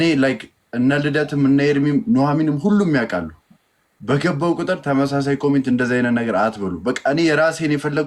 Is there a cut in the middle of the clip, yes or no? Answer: no